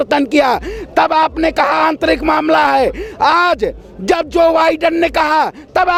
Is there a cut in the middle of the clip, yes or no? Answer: no